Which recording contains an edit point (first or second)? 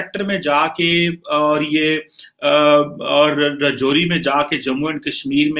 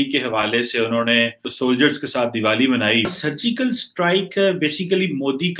second